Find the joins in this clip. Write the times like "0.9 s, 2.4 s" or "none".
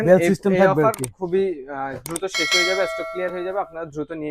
none